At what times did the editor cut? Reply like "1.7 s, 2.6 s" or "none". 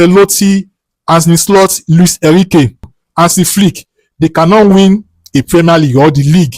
3.0 s